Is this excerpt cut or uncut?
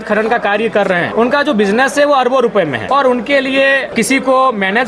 cut